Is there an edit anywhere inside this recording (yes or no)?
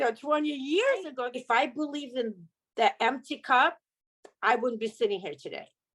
yes